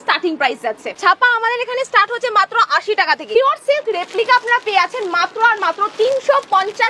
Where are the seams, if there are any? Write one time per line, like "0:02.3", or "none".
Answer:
0:00.9
0:03.4